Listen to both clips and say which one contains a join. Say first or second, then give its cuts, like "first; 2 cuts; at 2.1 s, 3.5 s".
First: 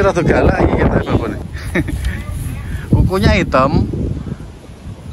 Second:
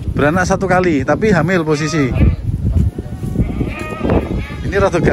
first; 1 cut; at 1.4 s